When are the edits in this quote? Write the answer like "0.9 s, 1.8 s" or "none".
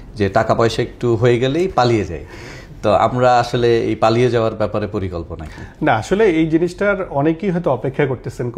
none